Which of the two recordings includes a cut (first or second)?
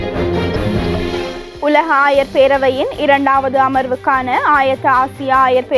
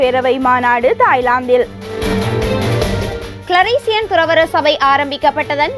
first